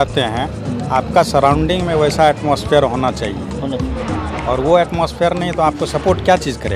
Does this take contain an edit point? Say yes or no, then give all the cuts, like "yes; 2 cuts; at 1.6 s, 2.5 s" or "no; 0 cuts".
no; 0 cuts